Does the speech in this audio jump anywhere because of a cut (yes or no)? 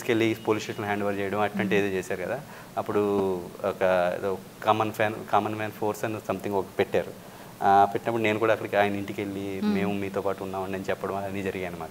no